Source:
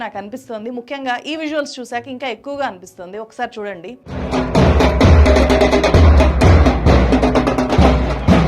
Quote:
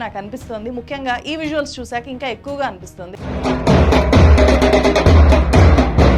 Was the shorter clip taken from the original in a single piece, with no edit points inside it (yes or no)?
no